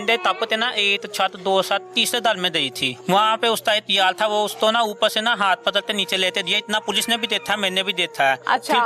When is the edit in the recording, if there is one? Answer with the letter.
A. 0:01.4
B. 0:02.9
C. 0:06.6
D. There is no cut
B